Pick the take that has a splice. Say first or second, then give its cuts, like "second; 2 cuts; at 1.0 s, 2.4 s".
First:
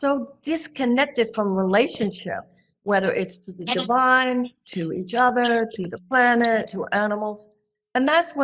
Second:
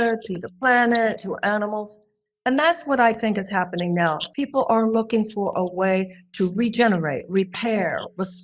second; 1 cut; at 4.3 s